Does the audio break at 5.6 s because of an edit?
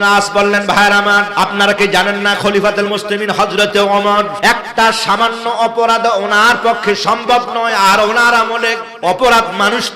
no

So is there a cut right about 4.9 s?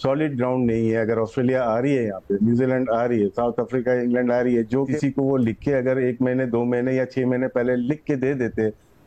yes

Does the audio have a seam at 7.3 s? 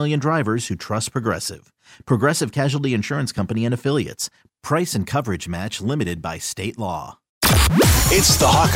yes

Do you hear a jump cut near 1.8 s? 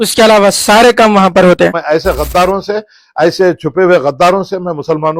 yes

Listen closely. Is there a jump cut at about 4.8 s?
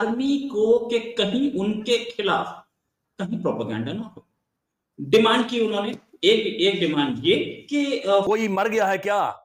no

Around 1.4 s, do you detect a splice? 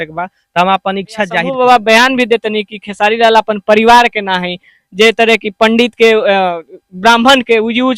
yes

